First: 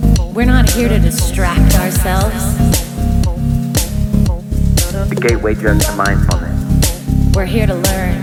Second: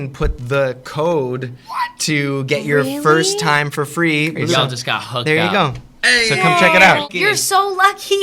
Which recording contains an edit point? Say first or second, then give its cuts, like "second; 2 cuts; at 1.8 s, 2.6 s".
second; 2 cuts; at 4.5 s, 7.1 s